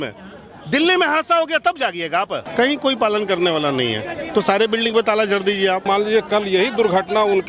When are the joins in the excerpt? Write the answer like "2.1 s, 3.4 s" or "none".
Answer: 2.5 s, 5.8 s